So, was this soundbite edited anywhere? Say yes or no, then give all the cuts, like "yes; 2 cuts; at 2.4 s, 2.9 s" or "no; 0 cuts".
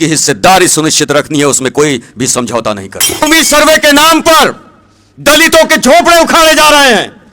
yes; 1 cut; at 3.2 s